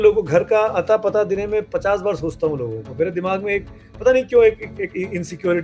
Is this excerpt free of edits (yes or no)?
yes